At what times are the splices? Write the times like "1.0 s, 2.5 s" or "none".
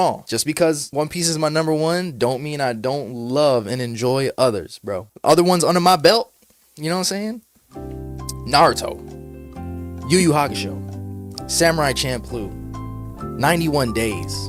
none